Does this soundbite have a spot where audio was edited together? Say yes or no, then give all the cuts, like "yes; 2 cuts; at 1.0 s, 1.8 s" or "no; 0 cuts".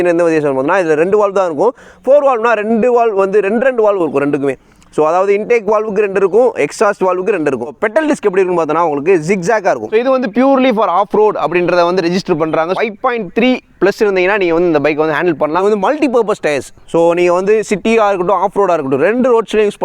yes; 4 cuts; at 7.7 s, 10.0 s, 12.7 s, 15.6 s